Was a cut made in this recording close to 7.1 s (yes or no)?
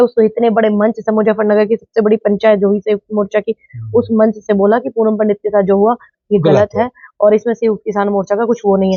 no